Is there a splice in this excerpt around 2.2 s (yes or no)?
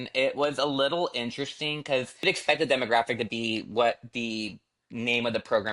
yes